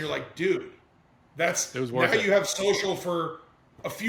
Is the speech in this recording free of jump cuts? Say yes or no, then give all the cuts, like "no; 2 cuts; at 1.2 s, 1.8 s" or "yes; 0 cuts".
yes; 0 cuts